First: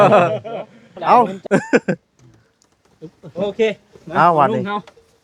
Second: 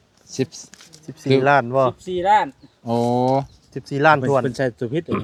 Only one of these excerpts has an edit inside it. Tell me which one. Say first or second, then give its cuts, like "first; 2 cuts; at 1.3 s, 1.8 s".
first; 1 cut; at 1.4 s